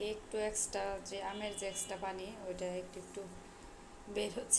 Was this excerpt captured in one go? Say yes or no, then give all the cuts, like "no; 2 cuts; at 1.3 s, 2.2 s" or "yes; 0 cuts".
yes; 0 cuts